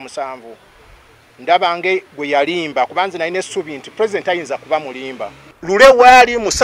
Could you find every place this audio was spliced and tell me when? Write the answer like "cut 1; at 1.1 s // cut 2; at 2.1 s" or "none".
cut 1; at 5.5 s